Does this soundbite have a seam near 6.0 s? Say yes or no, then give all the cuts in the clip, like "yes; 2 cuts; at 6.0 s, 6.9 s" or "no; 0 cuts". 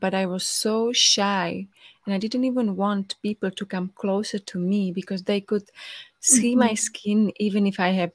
no; 0 cuts